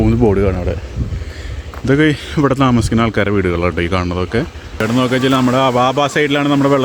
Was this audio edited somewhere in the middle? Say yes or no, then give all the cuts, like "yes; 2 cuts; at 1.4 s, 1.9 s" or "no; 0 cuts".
yes; 1 cut; at 4.8 s